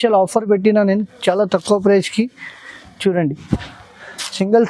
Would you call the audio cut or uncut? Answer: uncut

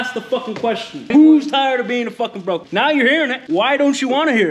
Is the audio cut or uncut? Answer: cut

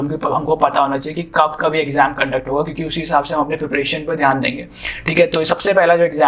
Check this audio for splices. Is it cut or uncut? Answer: uncut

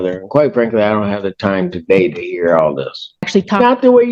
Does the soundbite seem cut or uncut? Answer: cut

